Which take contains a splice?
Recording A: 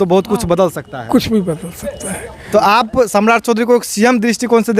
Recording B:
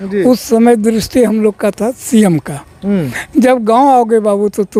A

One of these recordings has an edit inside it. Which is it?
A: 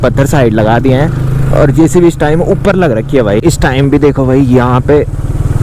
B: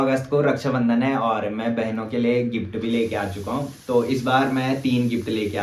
A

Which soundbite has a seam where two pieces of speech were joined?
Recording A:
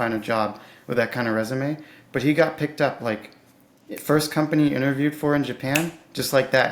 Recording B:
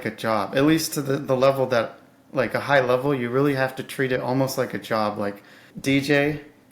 B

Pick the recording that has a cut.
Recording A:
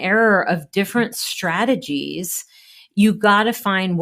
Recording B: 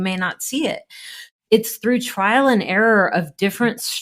B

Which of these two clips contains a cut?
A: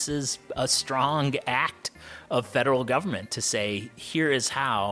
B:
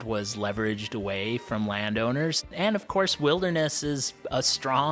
B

